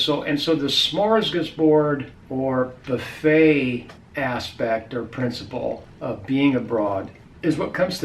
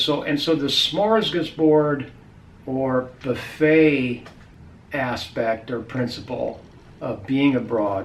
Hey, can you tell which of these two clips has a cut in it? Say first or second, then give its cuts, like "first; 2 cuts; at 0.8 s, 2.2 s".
first; 3 cuts; at 2.2 s, 4.0 s, 5.9 s